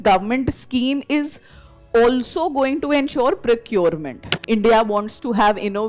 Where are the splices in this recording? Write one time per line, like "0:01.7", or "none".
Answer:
0:04.3